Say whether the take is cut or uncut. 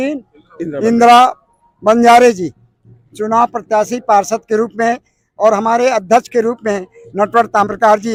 uncut